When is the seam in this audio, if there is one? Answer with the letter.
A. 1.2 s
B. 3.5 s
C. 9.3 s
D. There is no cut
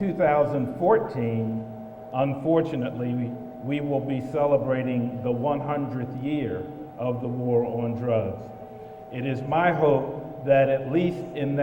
B